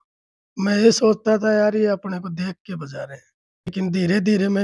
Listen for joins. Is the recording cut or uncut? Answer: cut